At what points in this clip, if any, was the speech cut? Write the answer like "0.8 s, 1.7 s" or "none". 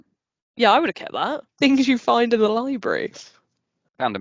1.4 s